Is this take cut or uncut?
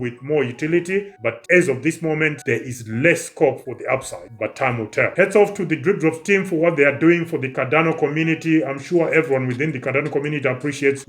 cut